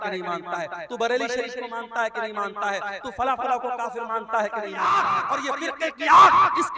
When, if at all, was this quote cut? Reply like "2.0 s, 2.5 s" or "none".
4.7 s